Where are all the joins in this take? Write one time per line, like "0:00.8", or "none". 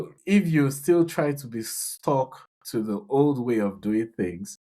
none

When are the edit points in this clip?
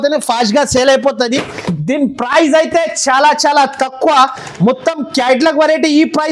none

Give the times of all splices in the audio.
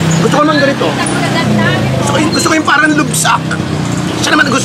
none

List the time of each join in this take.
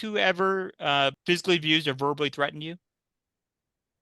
0:01.2

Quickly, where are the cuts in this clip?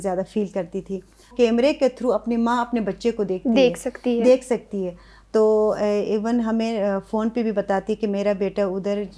0:01.3

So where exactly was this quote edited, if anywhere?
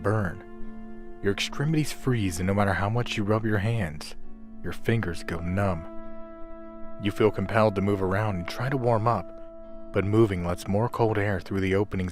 0:07.0

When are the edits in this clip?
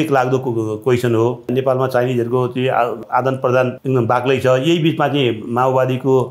0:01.5
0:03.0
0:03.8

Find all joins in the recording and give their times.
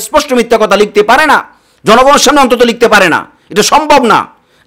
none

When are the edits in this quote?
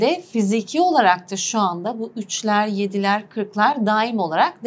none

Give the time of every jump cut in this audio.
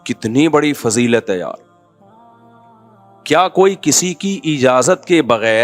0:01.6
0:03.3

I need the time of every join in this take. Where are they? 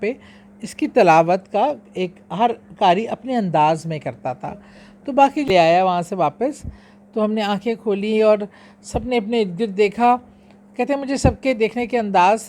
0:05.5

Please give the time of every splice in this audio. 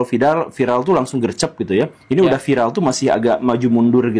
none

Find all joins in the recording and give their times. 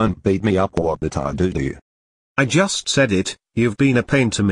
none

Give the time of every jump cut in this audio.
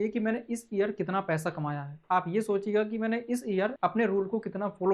0:03.7

